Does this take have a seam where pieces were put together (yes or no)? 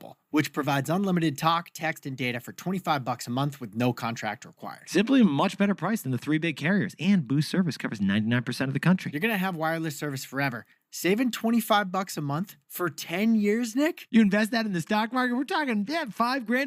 no